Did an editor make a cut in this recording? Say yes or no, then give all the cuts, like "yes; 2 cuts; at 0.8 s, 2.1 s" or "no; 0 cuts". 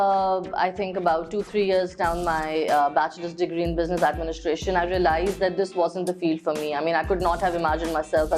no; 0 cuts